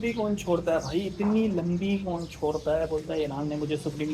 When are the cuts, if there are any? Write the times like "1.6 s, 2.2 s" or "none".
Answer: none